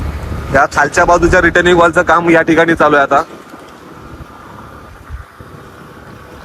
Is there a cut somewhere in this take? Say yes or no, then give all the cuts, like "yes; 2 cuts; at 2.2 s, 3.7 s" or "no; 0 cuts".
no; 0 cuts